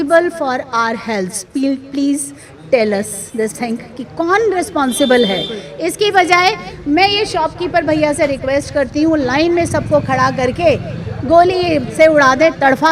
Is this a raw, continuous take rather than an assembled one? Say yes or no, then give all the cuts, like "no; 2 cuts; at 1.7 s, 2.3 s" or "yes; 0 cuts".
yes; 0 cuts